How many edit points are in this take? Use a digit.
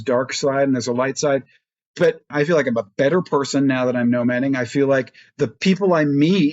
1